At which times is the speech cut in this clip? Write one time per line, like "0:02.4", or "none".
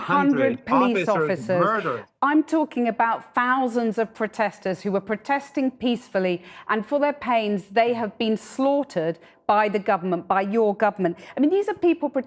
none